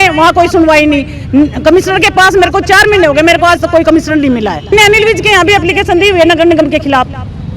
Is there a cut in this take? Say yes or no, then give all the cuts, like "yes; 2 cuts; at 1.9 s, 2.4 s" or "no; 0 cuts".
yes; 1 cut; at 4.7 s